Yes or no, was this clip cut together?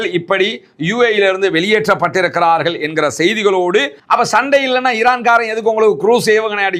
yes